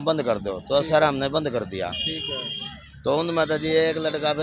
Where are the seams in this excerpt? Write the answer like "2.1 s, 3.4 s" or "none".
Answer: none